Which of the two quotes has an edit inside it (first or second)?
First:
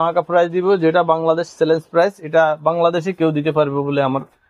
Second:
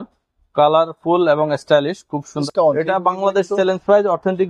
second